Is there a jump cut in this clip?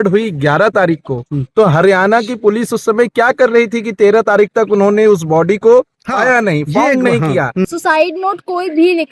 yes; 1 cut; at 7.6 s

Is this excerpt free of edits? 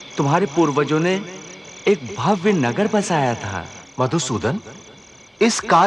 no; 1 cut; at 3.8 s

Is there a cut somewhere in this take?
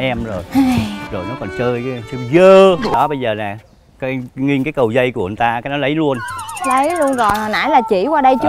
yes; 1 cut; at 2.9 s

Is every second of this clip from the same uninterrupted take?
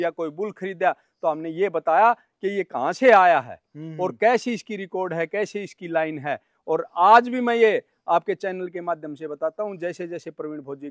yes; 0 cuts

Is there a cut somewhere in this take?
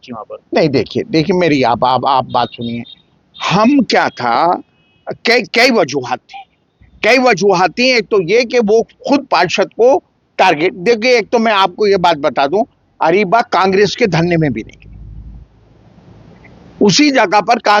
no; 0 cuts

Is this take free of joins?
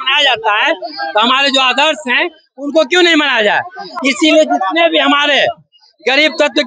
yes; 0 cuts

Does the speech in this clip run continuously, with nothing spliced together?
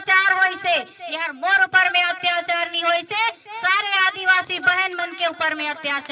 yes; 0 cuts

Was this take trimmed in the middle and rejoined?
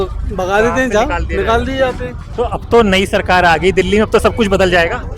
yes; 1 cut; at 2.2 s

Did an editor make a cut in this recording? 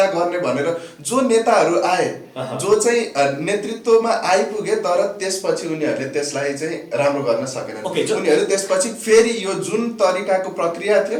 no; 0 cuts

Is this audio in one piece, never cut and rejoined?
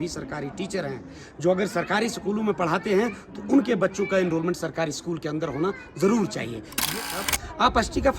no; 1 cut; at 6.9 s

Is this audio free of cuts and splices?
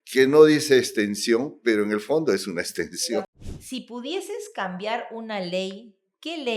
no; 1 cut; at 3.3 s

